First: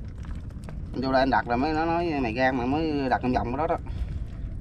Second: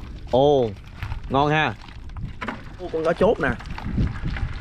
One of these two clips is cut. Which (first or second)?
second